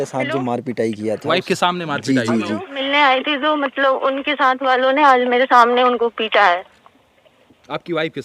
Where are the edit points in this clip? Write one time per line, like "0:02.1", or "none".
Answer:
0:02.7